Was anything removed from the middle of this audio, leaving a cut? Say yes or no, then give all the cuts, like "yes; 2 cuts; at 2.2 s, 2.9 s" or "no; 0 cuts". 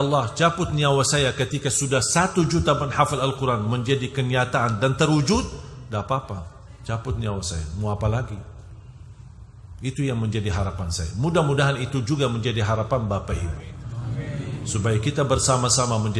no; 0 cuts